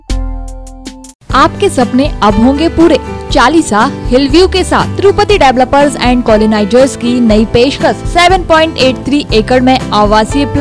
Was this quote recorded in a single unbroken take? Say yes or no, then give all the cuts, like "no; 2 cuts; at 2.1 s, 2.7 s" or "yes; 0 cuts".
yes; 0 cuts